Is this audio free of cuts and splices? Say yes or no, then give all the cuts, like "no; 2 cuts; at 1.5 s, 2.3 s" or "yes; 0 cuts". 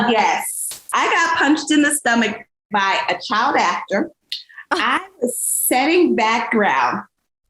yes; 0 cuts